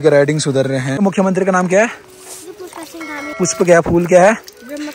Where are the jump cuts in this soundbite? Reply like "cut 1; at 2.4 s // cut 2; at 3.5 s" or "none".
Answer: cut 1; at 1.0 s // cut 2; at 3.4 s